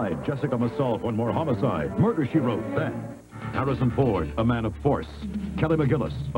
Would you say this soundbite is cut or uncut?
uncut